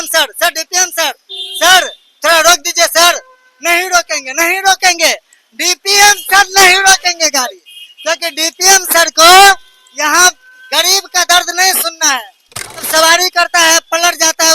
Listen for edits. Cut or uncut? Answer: cut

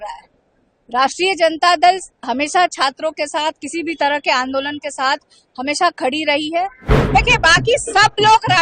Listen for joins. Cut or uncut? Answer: cut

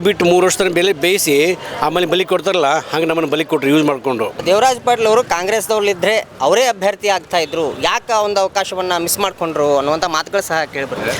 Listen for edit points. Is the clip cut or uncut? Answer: cut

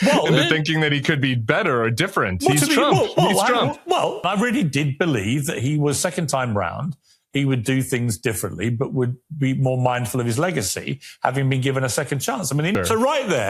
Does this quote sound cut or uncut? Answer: cut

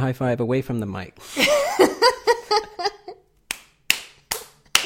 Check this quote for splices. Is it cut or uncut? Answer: uncut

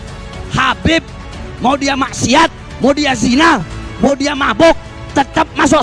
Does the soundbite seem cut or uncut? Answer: uncut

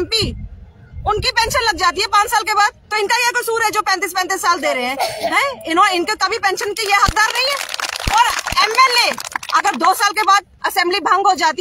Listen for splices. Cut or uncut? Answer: uncut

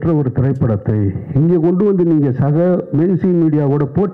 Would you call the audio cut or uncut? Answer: uncut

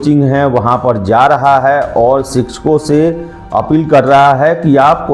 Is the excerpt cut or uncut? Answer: uncut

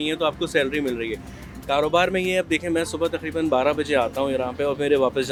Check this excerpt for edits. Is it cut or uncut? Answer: uncut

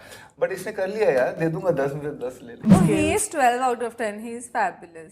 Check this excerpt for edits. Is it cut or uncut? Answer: cut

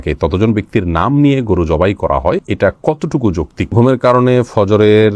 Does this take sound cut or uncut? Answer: cut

